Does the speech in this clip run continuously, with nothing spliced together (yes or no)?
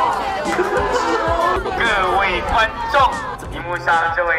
no